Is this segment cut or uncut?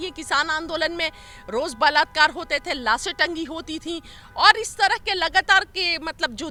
uncut